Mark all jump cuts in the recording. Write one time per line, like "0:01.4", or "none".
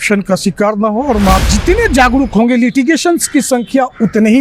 0:01.4